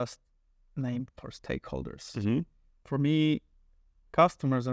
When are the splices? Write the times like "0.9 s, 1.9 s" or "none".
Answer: none